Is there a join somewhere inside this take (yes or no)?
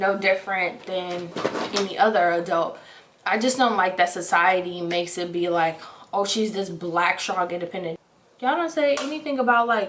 no